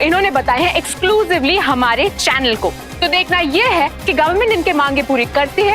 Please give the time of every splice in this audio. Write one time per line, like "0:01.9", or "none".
none